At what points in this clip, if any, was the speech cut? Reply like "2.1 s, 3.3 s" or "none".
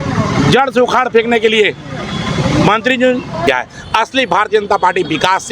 3.5 s

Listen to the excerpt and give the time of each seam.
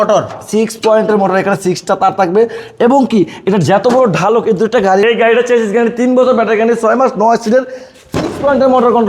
5.0 s

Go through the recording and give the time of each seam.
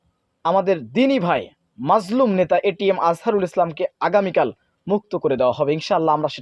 none

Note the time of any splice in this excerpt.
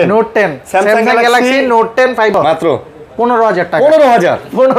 2.4 s

